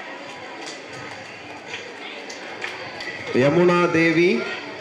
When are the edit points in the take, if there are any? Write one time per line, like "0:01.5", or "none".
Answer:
0:03.0